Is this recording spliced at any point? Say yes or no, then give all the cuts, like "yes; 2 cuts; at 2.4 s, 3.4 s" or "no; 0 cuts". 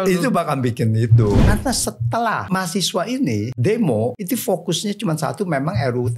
yes; 4 cuts; at 1.4 s, 2.5 s, 3.5 s, 4.2 s